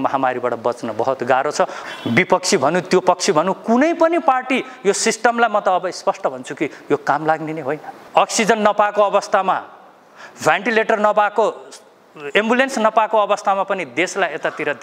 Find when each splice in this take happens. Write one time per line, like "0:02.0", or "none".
0:01.8
0:07.9